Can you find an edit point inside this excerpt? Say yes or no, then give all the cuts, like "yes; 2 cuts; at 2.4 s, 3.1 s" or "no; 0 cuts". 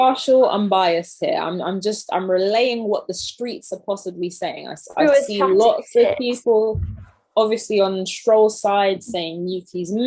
no; 0 cuts